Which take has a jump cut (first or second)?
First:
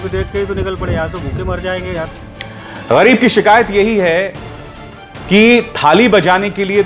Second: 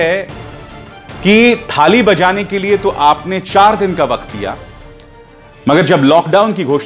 first